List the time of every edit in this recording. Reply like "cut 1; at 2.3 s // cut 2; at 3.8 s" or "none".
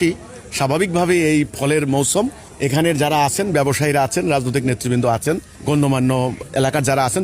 cut 1; at 2.4 s // cut 2; at 5.5 s // cut 3; at 6.4 s